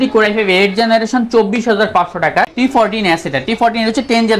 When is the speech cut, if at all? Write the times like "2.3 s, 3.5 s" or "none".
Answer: 2.5 s